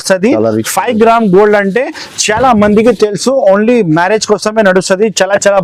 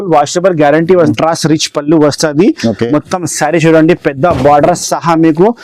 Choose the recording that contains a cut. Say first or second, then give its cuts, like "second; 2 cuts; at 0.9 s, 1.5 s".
second; 1 cut; at 1.1 s